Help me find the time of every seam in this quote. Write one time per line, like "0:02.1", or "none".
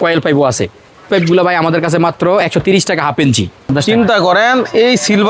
0:01.1
0:03.7